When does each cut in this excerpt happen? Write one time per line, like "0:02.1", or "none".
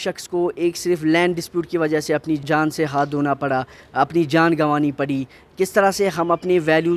0:02.4